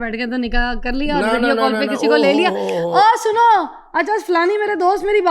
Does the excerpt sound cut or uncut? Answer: uncut